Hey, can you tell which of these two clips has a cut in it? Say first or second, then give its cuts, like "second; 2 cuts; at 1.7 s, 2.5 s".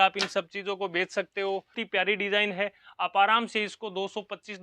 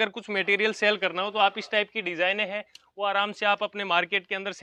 first; 1 cut; at 1.8 s